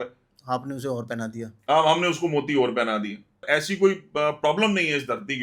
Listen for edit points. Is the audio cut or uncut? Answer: cut